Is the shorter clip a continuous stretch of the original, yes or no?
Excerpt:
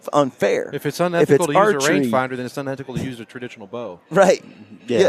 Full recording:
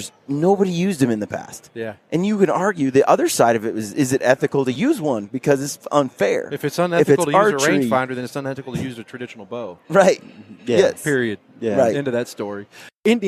yes